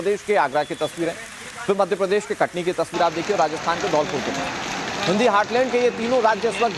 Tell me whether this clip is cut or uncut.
cut